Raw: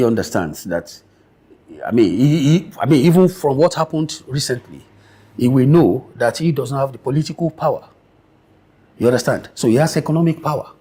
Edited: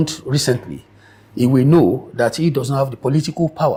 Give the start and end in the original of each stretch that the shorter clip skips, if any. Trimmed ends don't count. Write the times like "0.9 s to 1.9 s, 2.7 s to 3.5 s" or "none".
none